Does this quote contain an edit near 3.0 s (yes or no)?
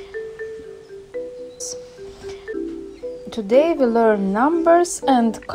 no